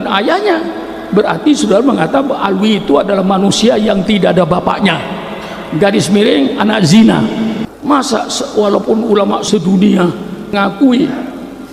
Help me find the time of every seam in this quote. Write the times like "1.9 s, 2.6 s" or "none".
7.6 s, 9.4 s, 10.5 s